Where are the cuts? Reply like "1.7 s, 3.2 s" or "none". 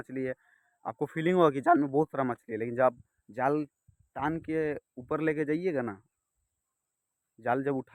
none